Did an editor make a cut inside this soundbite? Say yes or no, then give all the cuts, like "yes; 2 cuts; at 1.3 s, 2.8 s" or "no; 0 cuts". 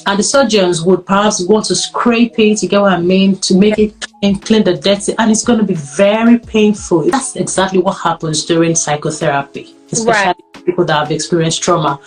yes; 1 cut; at 7.2 s